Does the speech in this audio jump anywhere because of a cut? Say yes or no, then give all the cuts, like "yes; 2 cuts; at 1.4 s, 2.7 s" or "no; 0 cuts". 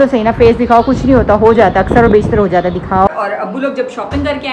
yes; 1 cut; at 3.1 s